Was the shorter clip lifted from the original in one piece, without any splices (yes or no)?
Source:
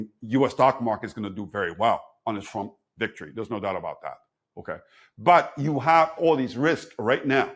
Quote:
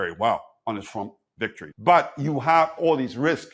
no